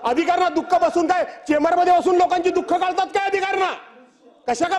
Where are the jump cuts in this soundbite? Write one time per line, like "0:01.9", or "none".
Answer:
none